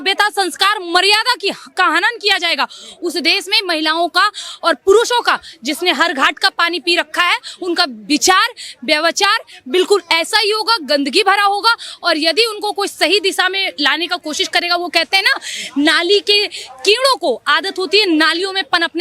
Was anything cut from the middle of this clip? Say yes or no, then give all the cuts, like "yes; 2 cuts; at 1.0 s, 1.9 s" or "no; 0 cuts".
no; 0 cuts